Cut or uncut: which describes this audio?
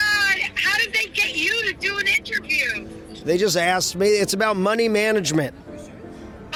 uncut